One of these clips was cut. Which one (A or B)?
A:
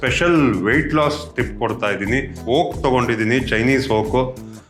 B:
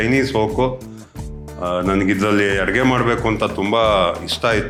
A